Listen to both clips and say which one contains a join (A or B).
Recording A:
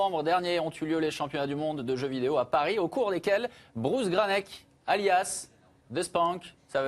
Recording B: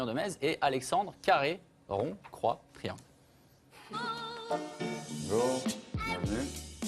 A